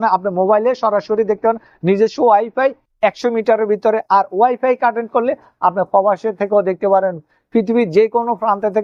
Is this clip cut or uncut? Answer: uncut